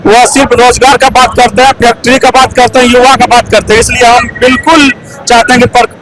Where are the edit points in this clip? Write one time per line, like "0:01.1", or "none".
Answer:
none